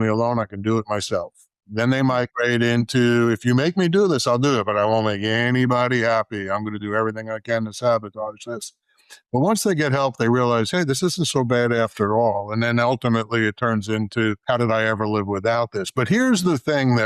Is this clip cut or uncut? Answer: cut